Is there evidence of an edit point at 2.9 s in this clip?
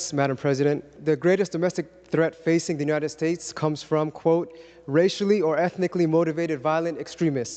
no; 1 cut; at 0.9 s

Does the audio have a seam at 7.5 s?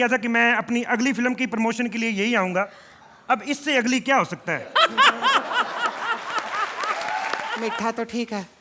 yes; 1 cut; at 7.5 s

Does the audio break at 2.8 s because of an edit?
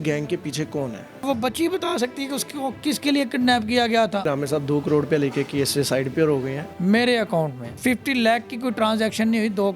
no; 4 cuts; at 1.2 s, 4.3 s, 6.7 s, 7.6 s

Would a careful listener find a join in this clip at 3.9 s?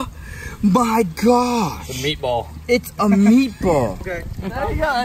yes; 1 cut; at 3.9 s

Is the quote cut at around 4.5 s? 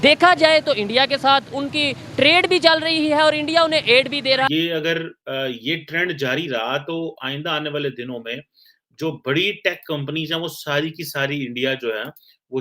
yes; 1 cut; at 4.5 s

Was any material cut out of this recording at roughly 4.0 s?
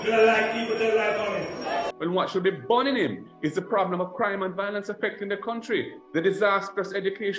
no; 1 cut; at 1.9 s

